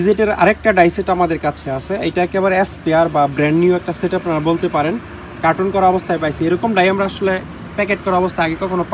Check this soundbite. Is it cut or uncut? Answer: uncut